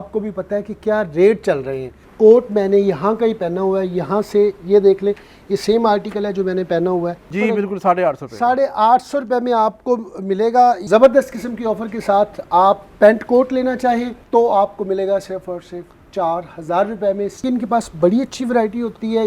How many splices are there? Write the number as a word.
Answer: five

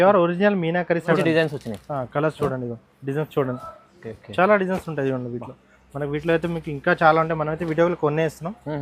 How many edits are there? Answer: one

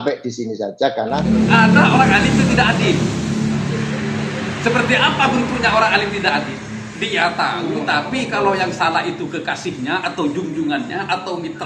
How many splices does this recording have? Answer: one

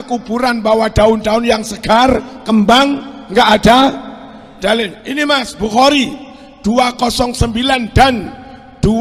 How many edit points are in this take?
zero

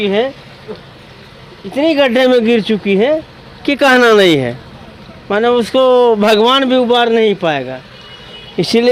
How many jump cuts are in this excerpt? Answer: zero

